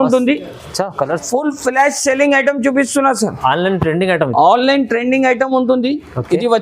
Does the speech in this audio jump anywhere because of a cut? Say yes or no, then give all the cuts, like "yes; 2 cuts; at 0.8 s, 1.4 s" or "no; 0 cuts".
yes; 1 cut; at 1.2 s